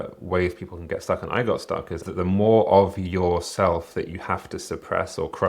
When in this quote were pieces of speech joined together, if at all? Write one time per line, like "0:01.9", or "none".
0:02.0